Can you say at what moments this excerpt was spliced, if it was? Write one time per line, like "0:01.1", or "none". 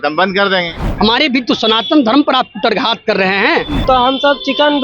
0:00.8
0:03.8